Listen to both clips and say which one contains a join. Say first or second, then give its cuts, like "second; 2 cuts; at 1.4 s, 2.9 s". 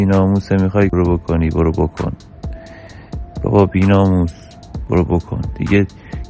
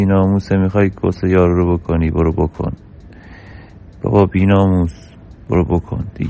first; 1 cut; at 0.9 s